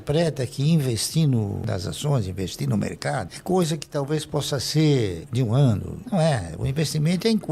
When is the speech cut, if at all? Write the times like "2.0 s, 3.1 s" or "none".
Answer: none